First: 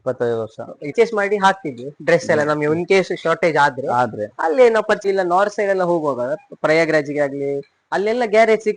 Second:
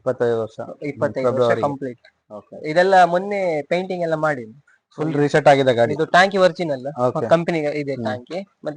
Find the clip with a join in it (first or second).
first